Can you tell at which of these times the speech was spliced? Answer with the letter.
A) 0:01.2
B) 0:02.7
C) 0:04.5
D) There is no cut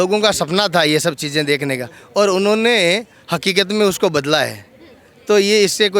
D